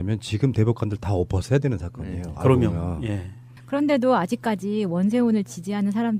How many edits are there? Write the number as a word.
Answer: zero